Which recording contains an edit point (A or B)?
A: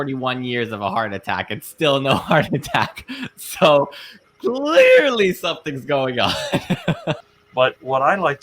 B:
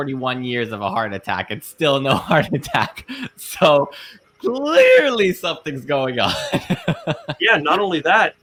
A